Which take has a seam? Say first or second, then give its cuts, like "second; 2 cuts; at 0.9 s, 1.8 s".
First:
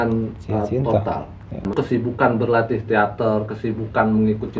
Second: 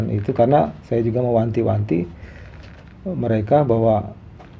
first; 1 cut; at 1.7 s